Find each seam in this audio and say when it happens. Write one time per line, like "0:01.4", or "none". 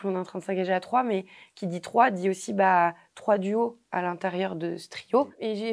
none